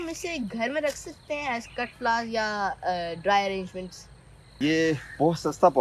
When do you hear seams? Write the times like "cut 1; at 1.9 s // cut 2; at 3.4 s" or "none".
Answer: cut 1; at 4.5 s